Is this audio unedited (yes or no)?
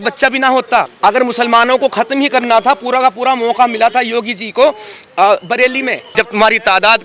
no